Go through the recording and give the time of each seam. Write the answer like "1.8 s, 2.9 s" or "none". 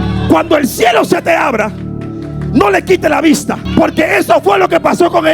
3.6 s